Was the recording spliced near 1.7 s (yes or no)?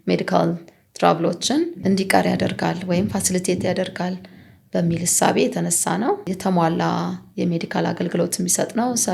yes